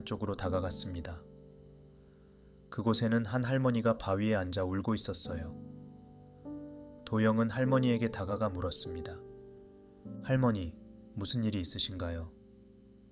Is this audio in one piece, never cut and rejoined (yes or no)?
yes